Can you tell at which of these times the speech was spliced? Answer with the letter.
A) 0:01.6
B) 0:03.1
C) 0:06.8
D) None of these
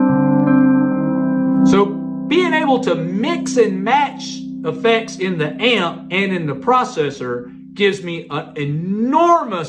A